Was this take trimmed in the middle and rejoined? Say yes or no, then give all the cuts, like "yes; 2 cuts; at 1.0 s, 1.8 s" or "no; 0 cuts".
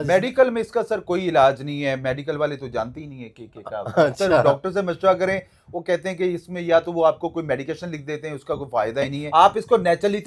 yes; 1 cut; at 9.2 s